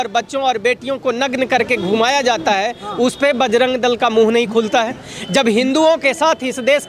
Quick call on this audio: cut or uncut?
uncut